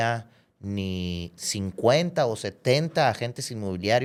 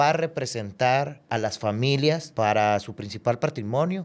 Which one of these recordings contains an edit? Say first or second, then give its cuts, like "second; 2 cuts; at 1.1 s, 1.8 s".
second; 2 cuts; at 1.2 s, 2.3 s